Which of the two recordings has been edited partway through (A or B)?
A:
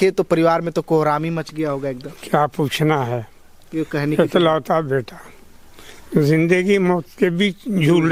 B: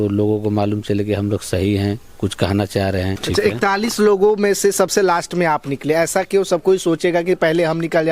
B